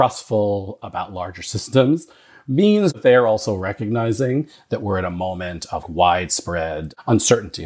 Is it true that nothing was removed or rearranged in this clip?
no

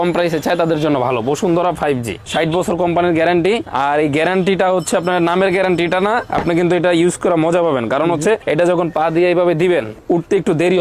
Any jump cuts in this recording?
no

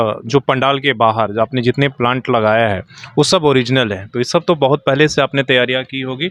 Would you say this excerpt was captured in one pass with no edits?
yes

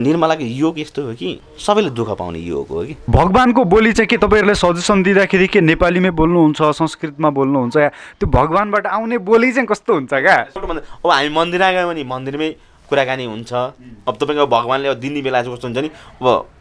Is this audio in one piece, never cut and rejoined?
no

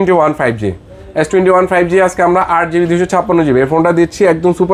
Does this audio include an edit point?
no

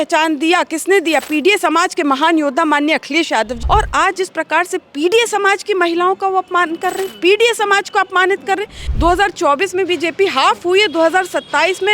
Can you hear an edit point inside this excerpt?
yes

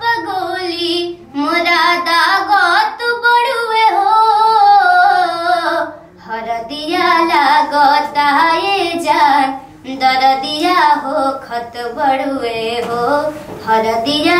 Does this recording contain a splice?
no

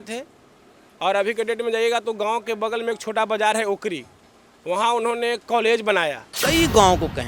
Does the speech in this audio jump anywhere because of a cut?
yes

